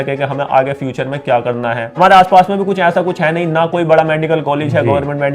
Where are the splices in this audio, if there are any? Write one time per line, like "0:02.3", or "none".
0:02.0